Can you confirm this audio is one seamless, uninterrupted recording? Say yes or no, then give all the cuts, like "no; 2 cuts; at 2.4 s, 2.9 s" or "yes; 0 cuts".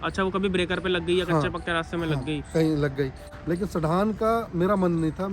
no; 1 cut; at 3.3 s